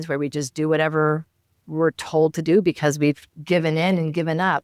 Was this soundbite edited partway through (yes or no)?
yes